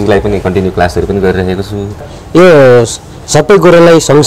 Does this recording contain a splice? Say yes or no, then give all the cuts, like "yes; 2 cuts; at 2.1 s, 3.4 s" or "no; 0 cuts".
yes; 1 cut; at 1.9 s